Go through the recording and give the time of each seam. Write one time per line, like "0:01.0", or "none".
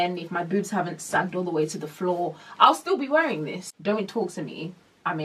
0:03.6